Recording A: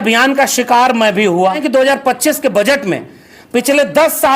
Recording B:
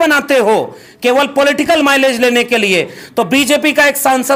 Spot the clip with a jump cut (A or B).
A